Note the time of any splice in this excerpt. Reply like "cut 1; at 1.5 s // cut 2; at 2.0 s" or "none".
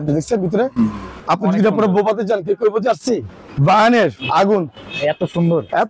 cut 1; at 1.1 s // cut 2; at 3.4 s